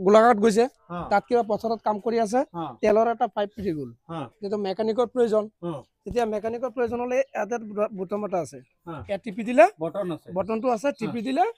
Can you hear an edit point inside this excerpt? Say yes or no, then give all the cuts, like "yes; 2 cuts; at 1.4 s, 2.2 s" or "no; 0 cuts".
no; 0 cuts